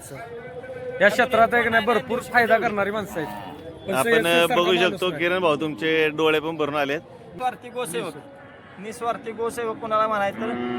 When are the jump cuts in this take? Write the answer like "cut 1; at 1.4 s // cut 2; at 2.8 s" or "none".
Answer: cut 1; at 7.2 s